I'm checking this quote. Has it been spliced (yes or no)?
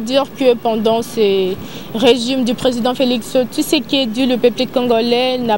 no